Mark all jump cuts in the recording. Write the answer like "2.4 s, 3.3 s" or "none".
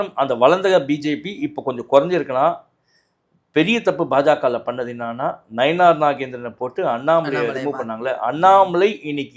none